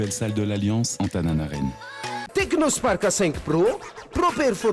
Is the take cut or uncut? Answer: cut